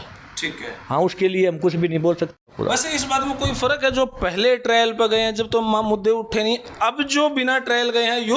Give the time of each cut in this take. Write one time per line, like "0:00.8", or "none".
0:02.8